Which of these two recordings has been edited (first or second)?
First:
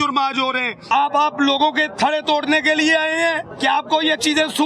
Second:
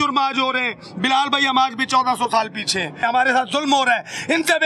first